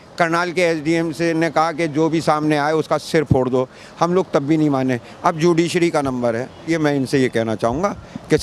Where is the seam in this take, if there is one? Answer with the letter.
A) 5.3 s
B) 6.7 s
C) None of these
B